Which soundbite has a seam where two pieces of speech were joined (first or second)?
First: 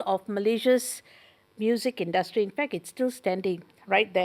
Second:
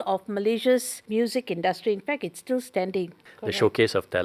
second